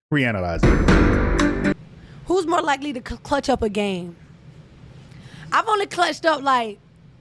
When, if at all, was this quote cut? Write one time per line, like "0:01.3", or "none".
0:01.7